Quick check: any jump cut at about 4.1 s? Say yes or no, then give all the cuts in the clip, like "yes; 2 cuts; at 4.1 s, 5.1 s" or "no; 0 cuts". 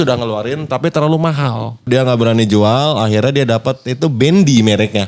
no; 1 cut; at 1.9 s